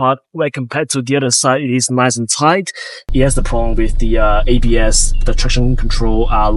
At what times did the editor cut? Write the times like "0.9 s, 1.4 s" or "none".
3.1 s